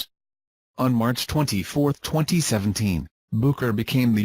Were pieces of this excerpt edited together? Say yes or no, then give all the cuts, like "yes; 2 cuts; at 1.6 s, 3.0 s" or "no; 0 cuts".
yes; 1 cut; at 2.6 s